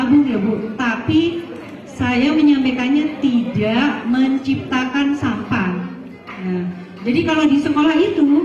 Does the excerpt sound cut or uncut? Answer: uncut